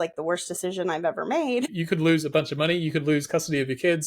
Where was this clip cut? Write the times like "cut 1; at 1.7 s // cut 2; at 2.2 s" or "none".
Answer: cut 1; at 1.8 s